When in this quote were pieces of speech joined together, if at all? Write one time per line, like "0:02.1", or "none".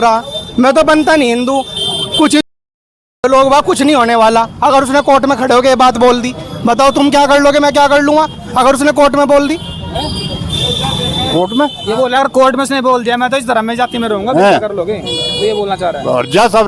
none